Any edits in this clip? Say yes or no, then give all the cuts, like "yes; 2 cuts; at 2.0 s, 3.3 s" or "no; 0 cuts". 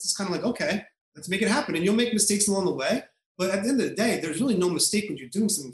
no; 0 cuts